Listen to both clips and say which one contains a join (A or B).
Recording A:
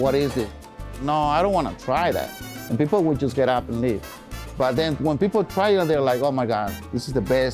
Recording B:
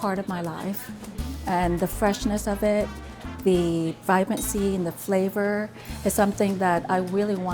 A